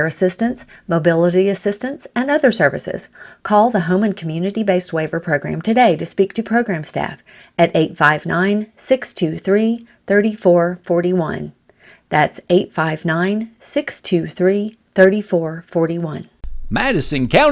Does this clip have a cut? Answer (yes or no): yes